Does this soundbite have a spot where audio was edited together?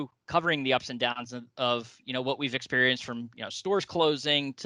no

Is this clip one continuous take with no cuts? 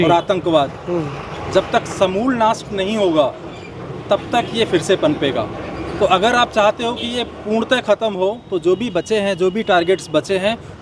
yes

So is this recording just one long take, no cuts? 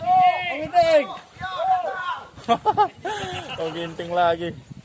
yes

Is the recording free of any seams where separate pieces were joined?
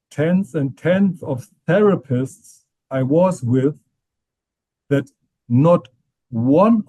yes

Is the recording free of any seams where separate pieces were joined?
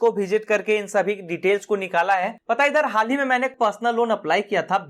no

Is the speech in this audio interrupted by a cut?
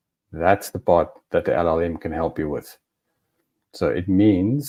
no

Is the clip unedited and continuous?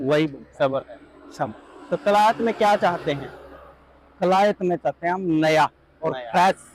yes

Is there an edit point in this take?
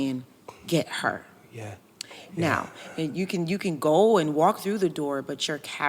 no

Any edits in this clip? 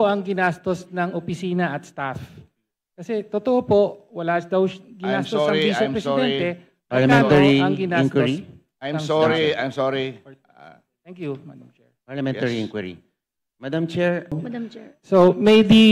yes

